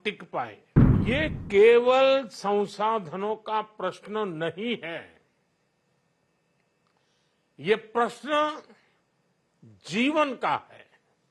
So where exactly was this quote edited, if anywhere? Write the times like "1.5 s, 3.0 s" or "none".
1.0 s